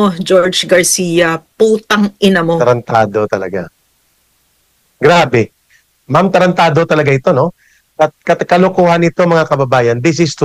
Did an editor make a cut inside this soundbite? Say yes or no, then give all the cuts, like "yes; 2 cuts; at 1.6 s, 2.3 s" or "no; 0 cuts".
no; 0 cuts